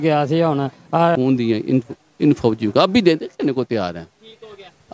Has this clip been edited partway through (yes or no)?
yes